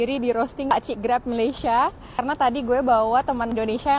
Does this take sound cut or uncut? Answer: uncut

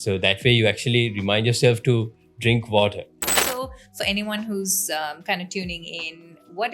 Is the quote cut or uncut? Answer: cut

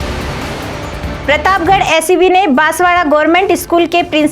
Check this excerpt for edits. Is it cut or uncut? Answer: cut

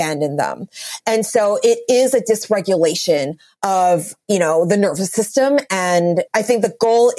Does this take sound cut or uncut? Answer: cut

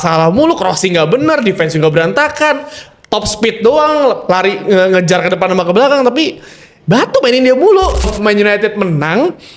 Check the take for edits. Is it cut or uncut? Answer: cut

